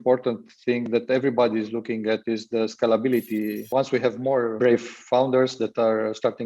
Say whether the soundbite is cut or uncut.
cut